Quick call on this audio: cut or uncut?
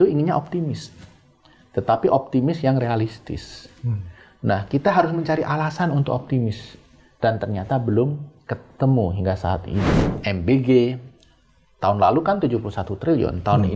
cut